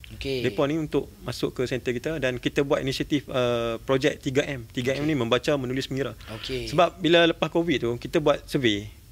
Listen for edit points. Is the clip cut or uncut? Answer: uncut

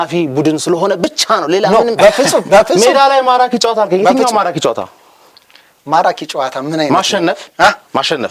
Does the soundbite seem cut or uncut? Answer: uncut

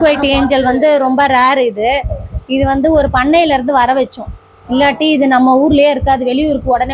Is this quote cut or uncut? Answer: uncut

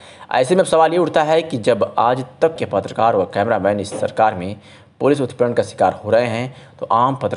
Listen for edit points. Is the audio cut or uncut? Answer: cut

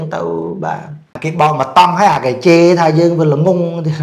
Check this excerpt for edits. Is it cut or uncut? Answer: cut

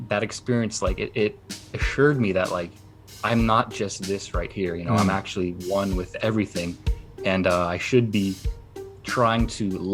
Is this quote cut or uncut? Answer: uncut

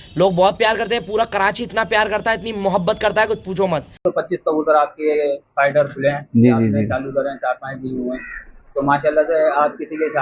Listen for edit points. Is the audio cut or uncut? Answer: uncut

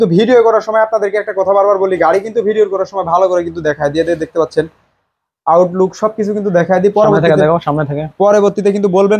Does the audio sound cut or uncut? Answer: uncut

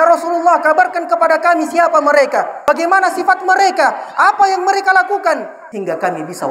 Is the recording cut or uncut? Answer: cut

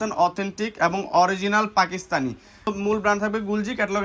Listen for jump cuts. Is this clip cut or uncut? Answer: cut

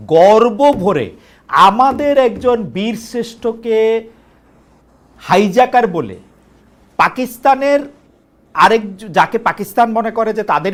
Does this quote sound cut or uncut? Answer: uncut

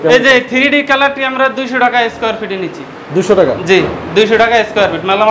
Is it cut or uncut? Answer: uncut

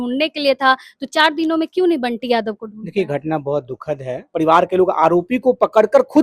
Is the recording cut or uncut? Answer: cut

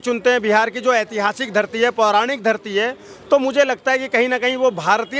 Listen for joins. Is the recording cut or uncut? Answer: uncut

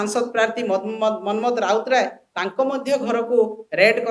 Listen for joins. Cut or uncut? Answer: uncut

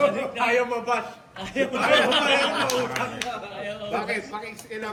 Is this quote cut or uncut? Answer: uncut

